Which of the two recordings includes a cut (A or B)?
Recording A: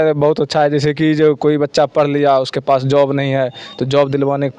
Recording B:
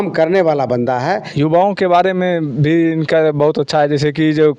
B